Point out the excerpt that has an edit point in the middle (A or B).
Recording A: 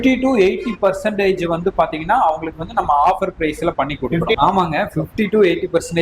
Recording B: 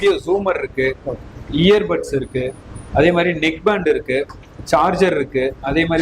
A